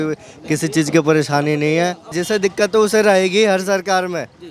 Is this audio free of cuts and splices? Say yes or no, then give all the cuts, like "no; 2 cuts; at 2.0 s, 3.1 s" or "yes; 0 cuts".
no; 1 cut; at 2.1 s